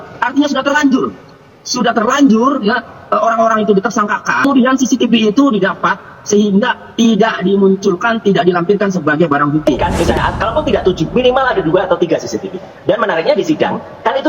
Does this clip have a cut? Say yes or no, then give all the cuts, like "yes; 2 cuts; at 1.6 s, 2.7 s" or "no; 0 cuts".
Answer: yes; 2 cuts; at 4.4 s, 9.8 s